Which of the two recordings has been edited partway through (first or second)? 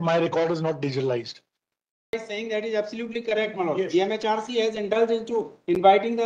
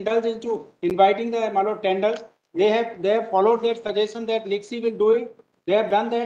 first